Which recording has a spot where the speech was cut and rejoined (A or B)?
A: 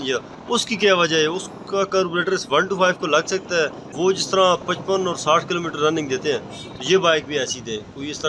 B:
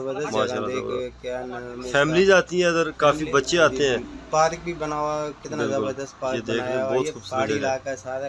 A